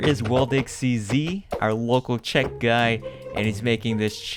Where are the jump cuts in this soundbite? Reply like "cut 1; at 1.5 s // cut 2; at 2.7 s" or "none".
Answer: none